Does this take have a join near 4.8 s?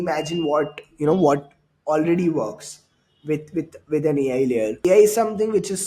yes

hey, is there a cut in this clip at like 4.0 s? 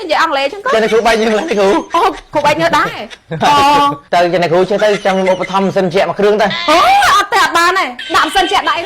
yes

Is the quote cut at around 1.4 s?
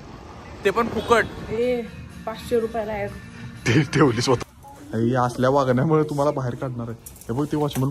yes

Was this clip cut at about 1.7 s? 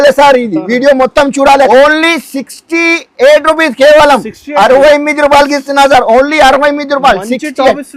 yes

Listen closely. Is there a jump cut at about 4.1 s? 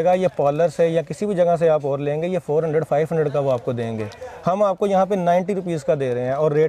no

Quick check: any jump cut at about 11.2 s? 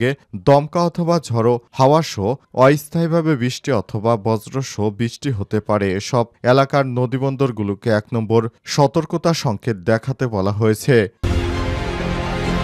yes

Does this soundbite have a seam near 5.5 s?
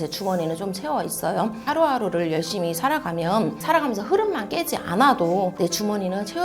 yes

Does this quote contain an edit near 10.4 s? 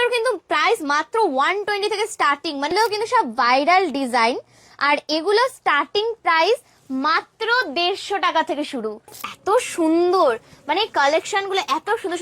no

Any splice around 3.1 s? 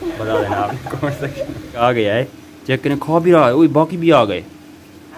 no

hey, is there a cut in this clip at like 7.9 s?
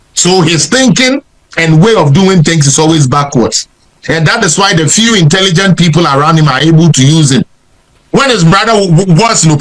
yes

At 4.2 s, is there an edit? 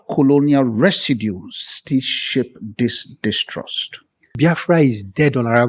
yes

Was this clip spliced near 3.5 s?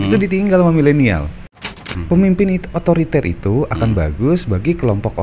no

